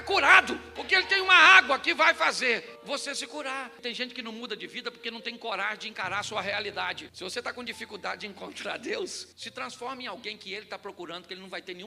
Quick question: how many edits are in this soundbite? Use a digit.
2